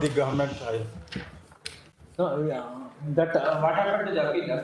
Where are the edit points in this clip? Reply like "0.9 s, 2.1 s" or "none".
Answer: none